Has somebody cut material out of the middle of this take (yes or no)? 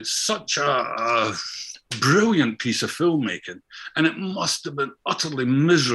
no